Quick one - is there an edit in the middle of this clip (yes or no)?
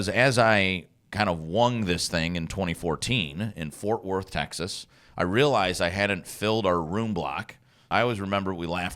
yes